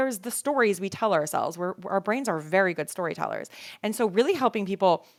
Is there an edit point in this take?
no; 0 cuts

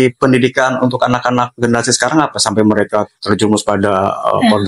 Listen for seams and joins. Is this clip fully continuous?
yes; 0 cuts

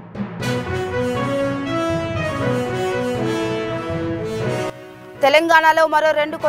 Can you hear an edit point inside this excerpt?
yes; 1 cut; at 4.7 s

